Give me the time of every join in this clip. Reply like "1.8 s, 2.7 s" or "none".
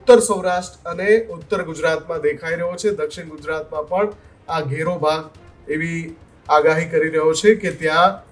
none